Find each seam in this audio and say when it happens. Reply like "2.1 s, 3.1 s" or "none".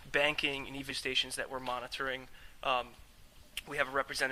none